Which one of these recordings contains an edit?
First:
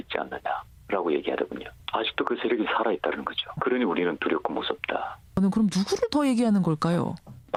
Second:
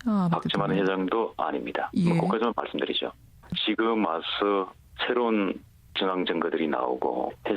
second; 1 cut; at 5.4 s

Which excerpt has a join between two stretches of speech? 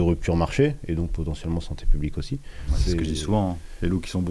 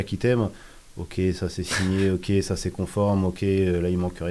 first; 1 cut; at 2.6 s

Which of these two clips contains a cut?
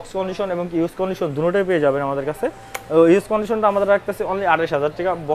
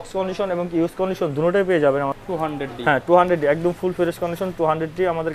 second; 1 cut; at 2.1 s

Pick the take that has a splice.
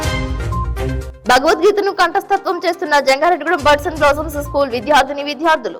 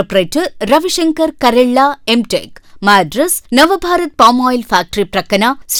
first; 1 cut; at 1.1 s

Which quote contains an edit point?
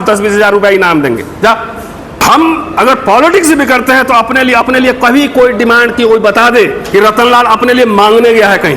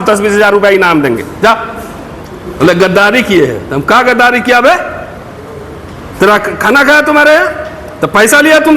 first; 2 cuts; at 2.2 s, 6.8 s

